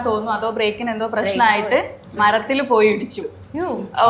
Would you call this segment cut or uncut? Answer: uncut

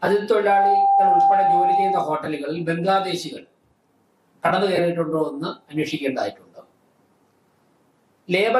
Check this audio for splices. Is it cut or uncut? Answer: uncut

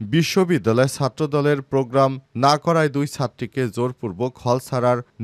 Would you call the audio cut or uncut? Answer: uncut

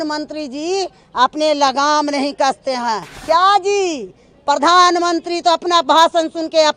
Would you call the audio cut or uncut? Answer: cut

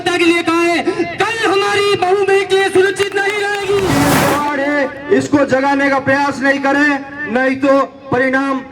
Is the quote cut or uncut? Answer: cut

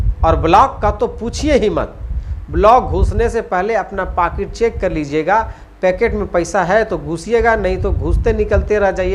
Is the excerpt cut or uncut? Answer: uncut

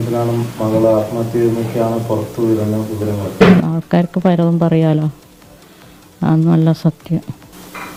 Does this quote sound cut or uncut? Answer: uncut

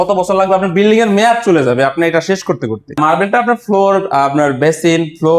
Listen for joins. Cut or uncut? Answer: cut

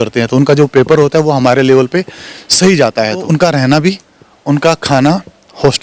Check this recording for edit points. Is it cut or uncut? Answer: cut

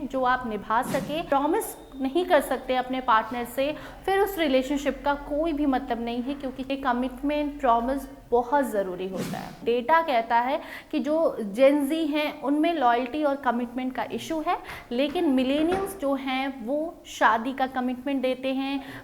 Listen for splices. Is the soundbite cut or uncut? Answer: cut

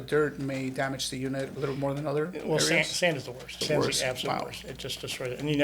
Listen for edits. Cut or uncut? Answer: cut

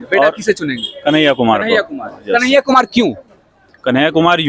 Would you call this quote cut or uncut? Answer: uncut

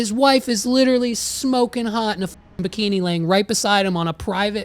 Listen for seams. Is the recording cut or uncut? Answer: uncut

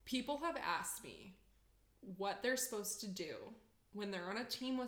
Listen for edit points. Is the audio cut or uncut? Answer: uncut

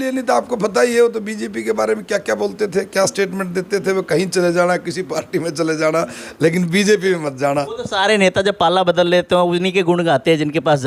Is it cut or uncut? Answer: uncut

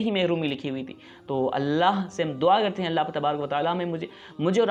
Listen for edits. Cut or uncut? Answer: uncut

